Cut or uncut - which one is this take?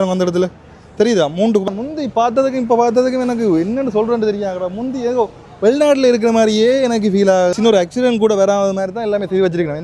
cut